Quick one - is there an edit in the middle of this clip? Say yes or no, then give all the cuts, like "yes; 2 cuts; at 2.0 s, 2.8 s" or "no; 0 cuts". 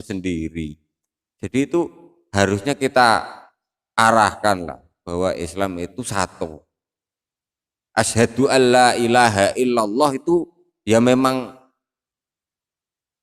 no; 0 cuts